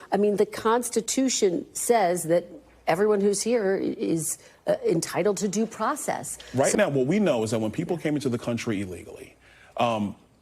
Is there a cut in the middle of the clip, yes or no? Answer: yes